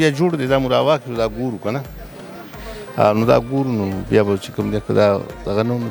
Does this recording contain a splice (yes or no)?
no